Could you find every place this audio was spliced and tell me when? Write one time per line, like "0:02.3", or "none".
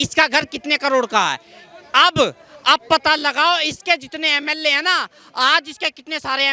none